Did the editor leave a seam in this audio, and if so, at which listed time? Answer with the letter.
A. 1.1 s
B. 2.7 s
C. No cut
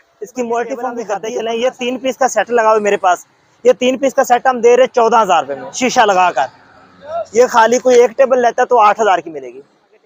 A